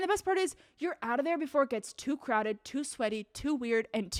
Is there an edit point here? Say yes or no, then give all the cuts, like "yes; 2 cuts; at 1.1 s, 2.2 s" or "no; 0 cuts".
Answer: no; 0 cuts